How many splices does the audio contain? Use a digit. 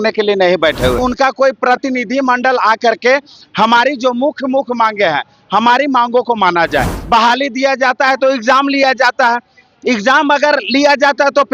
2